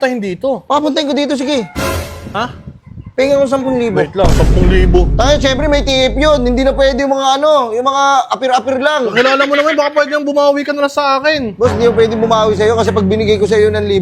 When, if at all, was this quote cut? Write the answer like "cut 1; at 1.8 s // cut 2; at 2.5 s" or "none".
none